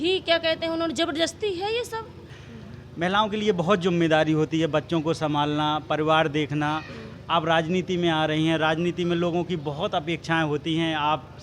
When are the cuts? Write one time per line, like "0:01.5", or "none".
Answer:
0:02.4

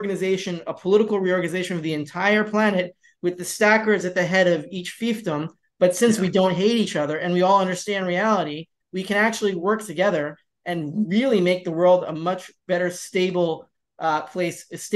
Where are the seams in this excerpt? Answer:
none

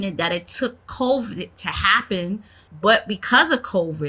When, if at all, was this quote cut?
0:02.6

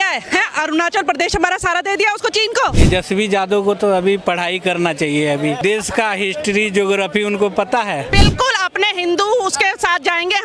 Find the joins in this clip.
0:02.7
0:05.6
0:08.1

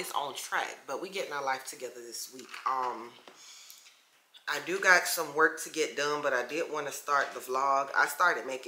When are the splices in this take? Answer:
none

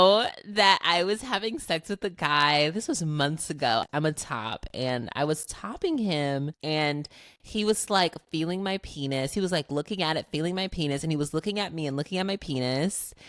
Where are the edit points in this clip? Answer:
0:03.8
0:06.5

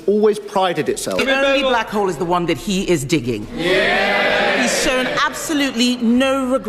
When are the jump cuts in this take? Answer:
0:01.1

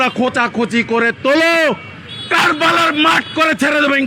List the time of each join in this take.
none

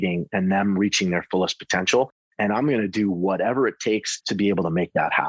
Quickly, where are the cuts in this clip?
0:04.1

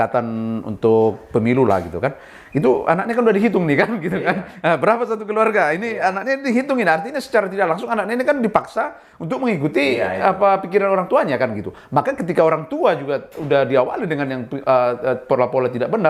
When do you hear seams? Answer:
none

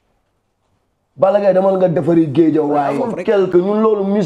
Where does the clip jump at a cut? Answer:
0:03.1

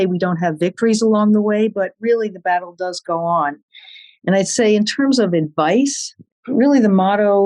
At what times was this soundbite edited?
0:06.3

